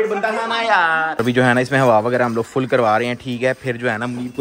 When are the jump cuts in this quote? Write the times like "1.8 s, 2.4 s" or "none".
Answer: 1.1 s